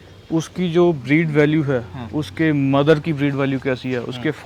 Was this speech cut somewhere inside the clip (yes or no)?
no